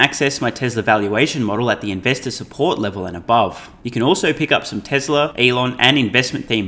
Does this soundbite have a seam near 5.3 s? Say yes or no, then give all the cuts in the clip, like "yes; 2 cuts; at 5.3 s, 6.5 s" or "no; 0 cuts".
yes; 2 cuts; at 3.7 s, 5.3 s